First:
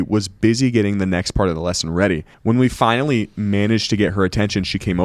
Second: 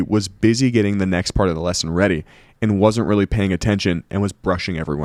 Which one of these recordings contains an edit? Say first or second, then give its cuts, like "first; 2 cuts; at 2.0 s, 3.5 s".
first; 1 cut; at 2.3 s